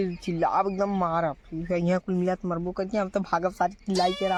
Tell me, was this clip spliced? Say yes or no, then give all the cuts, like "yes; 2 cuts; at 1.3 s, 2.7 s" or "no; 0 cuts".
no; 0 cuts